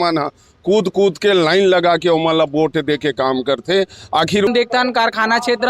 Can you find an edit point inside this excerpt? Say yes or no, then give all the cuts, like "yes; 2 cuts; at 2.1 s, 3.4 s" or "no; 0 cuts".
yes; 1 cut; at 4.5 s